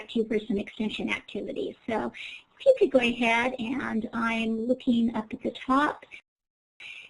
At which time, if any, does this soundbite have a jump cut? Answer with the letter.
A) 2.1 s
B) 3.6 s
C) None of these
B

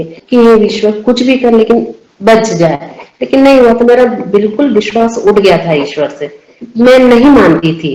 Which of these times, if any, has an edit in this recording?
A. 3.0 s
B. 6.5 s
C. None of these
C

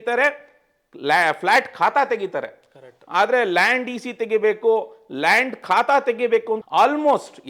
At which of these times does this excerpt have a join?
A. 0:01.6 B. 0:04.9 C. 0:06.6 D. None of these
C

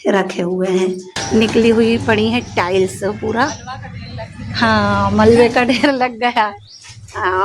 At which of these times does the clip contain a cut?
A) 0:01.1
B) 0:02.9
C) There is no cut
A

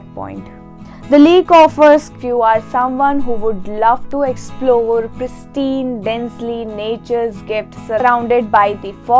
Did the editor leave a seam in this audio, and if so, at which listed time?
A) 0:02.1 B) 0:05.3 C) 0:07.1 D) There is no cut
A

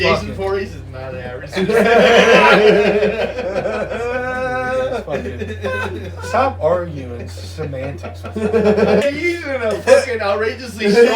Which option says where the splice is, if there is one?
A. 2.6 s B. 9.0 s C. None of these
B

